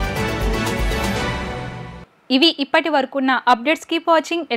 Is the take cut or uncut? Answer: uncut